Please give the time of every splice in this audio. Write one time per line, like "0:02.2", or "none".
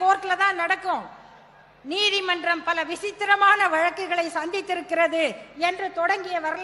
none